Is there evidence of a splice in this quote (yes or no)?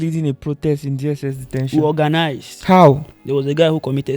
yes